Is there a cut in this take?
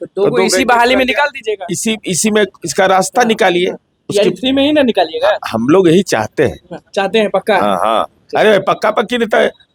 no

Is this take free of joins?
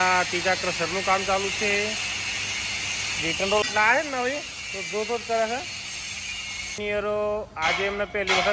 no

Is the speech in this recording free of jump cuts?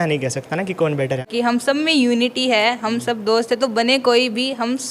no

